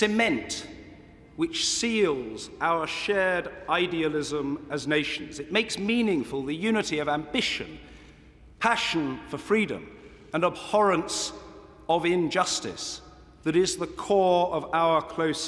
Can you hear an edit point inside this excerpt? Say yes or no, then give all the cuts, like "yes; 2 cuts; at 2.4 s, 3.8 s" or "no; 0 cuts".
yes; 1 cut; at 13.7 s